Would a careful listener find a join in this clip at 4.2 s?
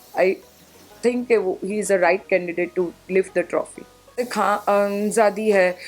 yes; 1 cut; at 4.2 s

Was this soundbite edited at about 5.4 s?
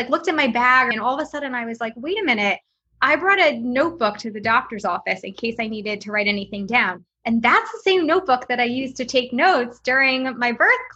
no; 1 cut; at 0.9 s

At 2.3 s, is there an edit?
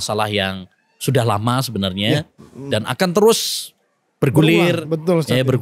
no; 0 cuts

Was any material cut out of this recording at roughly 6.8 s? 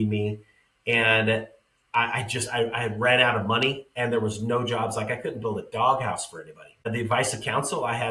yes; 1 cut; at 6.8 s

